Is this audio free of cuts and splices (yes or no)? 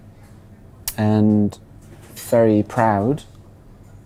yes